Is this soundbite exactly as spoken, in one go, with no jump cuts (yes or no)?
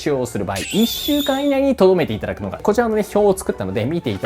no